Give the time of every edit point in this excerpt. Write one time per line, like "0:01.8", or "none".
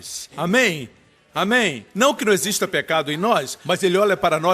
0:01.4